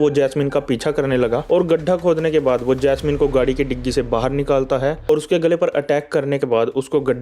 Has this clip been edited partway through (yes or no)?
yes